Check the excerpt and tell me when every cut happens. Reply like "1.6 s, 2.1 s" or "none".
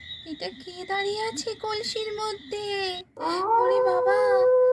3.2 s